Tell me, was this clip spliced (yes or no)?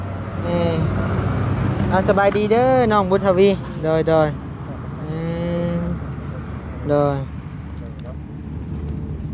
no